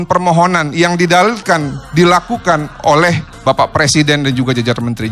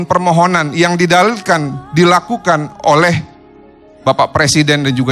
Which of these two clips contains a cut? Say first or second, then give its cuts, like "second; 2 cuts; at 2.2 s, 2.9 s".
first; 1 cut; at 3.3 s